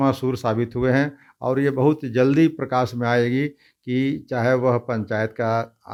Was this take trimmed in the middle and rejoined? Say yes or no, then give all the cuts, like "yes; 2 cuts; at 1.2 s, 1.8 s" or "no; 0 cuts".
no; 0 cuts